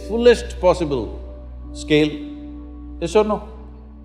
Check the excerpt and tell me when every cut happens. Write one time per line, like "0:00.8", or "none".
none